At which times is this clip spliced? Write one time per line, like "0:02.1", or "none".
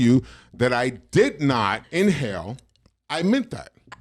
0:01.8